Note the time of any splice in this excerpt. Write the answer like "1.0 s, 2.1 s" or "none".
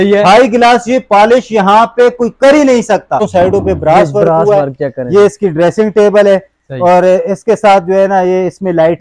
3.3 s